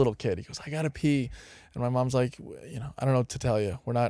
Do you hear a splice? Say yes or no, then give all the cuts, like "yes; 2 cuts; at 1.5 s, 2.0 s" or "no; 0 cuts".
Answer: no; 0 cuts